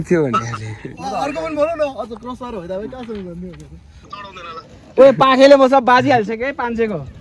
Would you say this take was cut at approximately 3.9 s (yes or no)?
yes